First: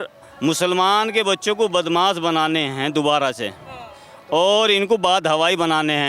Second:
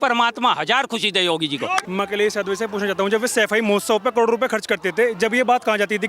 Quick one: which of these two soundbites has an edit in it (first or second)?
second